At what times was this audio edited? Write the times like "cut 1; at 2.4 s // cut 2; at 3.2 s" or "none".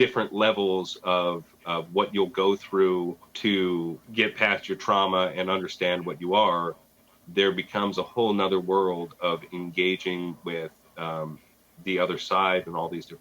cut 1; at 3.2 s // cut 2; at 4.0 s